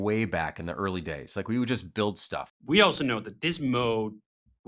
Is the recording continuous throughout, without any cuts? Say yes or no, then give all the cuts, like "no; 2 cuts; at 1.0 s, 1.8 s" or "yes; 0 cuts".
no; 1 cut; at 2.4 s